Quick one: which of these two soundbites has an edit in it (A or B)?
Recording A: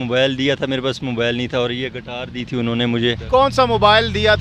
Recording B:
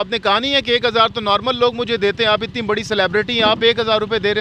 A